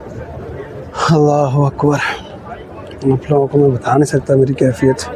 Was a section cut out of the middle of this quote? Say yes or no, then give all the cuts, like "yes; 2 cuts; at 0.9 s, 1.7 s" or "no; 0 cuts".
no; 0 cuts